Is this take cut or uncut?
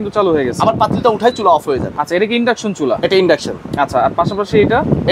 uncut